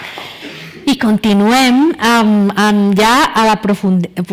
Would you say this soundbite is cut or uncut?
cut